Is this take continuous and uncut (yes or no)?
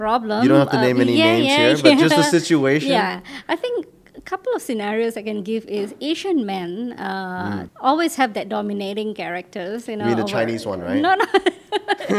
yes